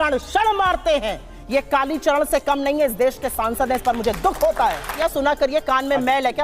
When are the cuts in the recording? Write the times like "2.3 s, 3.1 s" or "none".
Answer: 4.9 s